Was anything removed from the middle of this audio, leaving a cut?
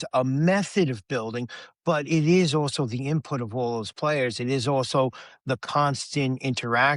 no; 0 cuts

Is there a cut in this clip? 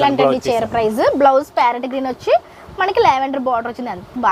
no; 0 cuts

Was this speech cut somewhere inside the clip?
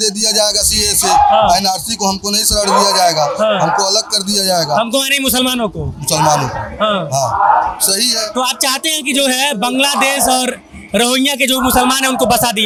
no; 0 cuts

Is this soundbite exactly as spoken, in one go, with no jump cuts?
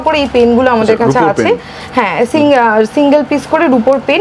yes; 0 cuts

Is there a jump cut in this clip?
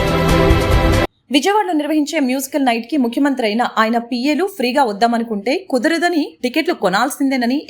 no; 0 cuts

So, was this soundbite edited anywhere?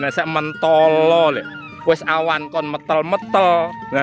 yes; 1 cut; at 1.7 s

